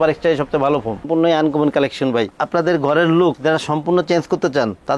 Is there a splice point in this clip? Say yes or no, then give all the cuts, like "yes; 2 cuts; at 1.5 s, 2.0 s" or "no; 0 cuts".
yes; 1 cut; at 1.0 s